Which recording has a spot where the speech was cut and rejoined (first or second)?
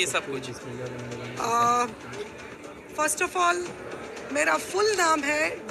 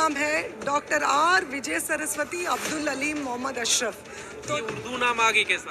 second